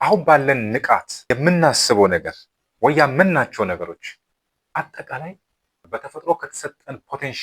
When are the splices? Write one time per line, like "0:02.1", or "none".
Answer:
0:01.1